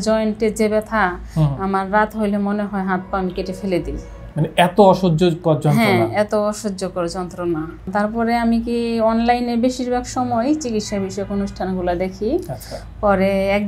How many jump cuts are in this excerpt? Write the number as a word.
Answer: one